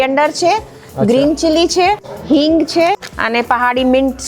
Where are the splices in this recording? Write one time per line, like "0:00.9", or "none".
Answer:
0:02.1
0:03.1